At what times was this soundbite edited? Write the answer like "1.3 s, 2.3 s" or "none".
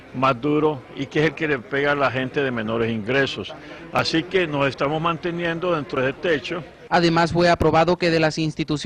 3.8 s

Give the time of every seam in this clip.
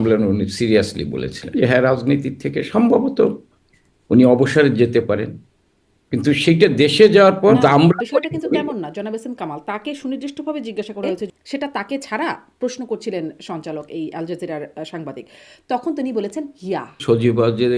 1.4 s, 7.5 s, 11.2 s, 17.0 s

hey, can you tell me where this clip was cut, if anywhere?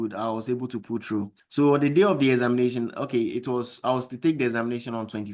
1.4 s

